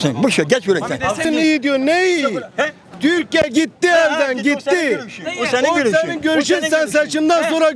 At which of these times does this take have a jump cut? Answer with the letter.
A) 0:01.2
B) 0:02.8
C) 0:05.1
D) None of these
A